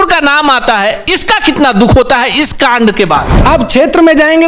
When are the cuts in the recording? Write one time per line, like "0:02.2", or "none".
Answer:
0:03.3